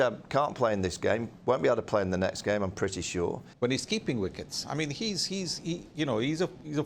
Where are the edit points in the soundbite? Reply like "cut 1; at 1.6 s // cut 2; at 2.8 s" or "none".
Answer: cut 1; at 3.4 s